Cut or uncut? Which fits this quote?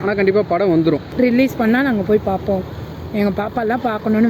cut